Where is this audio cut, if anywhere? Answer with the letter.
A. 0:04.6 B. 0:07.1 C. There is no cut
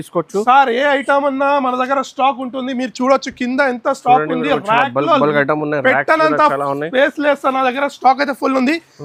C